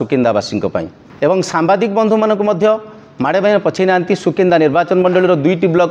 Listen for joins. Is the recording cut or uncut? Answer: cut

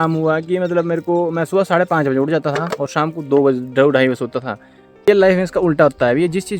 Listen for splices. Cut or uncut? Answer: cut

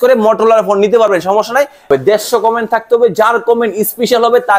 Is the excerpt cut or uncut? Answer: cut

